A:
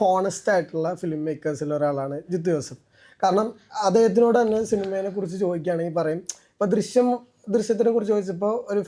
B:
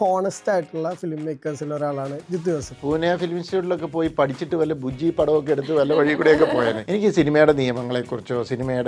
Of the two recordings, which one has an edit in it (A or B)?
B